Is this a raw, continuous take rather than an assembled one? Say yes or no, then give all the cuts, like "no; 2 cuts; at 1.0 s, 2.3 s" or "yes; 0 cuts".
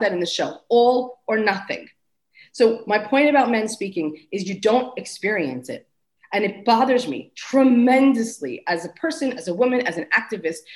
yes; 0 cuts